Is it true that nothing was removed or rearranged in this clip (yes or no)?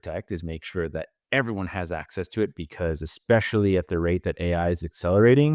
yes